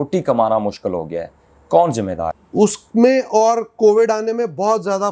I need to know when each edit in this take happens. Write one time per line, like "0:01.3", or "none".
0:02.4